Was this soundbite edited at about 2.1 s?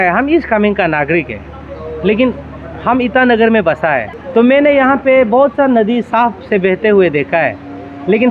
no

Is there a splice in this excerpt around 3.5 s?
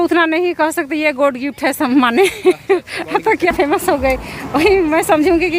yes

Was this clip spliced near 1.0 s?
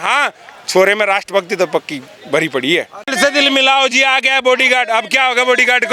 no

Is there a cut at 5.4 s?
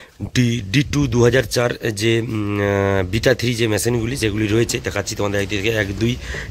no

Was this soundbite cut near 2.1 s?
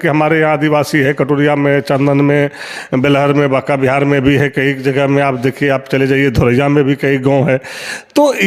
no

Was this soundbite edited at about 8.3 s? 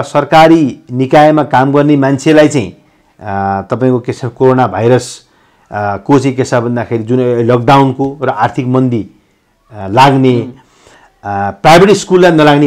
no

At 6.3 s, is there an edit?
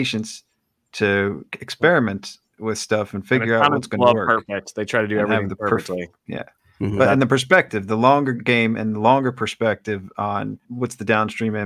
no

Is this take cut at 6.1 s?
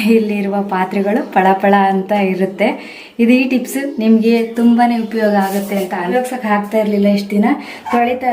yes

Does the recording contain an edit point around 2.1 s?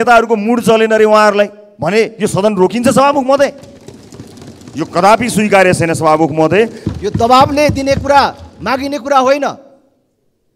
no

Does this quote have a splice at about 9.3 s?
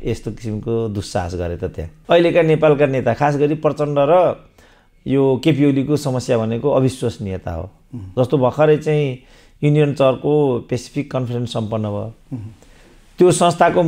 no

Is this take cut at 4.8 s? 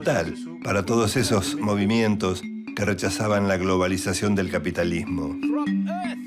no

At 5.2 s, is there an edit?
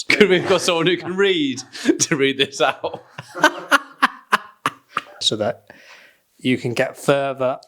yes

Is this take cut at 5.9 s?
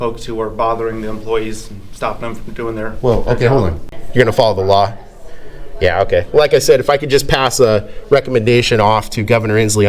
no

